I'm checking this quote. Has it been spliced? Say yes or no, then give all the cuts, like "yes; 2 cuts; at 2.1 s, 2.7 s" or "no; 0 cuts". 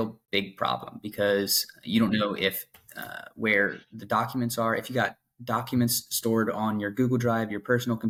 no; 0 cuts